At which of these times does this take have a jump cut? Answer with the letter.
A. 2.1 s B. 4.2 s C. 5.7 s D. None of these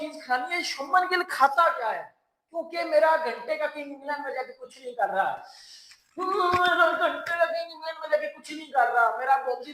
D